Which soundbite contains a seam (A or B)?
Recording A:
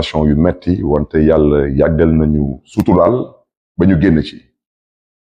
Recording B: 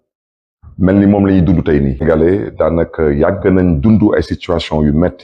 B